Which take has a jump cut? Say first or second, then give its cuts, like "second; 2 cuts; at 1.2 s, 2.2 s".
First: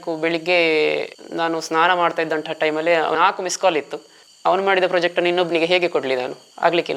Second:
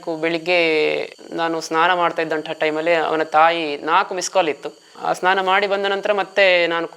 first; 2 cuts; at 3.1 s, 4.2 s